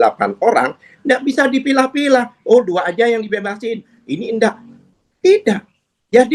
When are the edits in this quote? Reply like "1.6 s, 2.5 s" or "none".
none